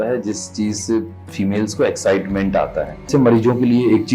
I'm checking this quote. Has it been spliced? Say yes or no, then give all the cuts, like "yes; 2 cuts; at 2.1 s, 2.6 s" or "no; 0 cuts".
yes; 1 cut; at 3.1 s